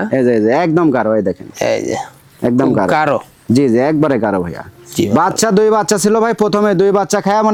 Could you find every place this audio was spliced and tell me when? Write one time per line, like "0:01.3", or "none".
none